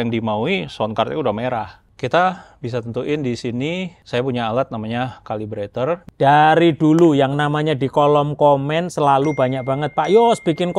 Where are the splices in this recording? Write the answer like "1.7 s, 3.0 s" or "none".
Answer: 1.8 s, 4.0 s, 6.1 s